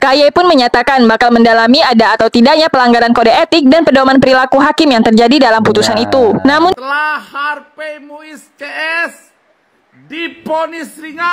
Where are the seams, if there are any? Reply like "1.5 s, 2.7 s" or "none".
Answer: 6.7 s